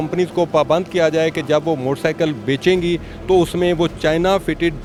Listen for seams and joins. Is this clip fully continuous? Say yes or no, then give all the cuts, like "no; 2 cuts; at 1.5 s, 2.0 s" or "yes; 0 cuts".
yes; 0 cuts